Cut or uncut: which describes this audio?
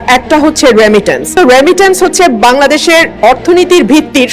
cut